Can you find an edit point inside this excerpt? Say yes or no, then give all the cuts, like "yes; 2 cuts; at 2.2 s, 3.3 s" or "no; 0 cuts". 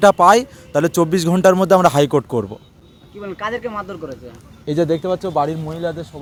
no; 0 cuts